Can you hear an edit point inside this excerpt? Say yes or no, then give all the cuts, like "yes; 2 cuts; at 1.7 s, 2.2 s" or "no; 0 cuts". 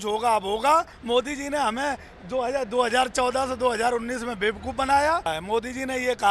yes; 2 cuts; at 0.9 s, 5.3 s